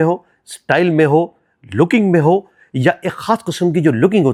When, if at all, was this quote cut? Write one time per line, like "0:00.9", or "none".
none